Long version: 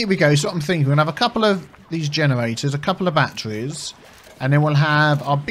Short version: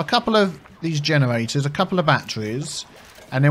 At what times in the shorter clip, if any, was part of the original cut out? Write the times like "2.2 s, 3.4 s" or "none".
none